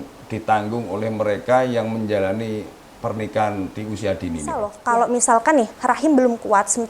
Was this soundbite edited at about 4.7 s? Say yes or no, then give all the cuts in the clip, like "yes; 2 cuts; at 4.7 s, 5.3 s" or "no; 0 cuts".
yes; 1 cut; at 4.7 s